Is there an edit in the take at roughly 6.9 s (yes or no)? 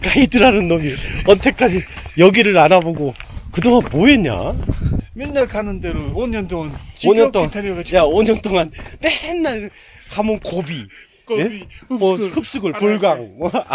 no